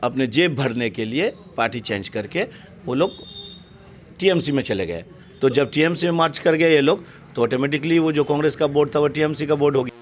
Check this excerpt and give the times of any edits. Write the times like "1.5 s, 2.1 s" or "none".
none